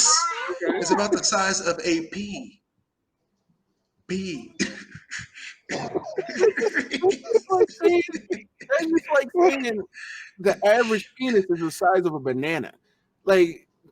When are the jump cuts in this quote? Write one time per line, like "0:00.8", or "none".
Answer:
none